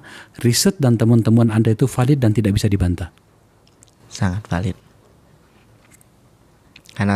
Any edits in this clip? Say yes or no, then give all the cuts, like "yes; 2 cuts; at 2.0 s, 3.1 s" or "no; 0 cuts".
no; 0 cuts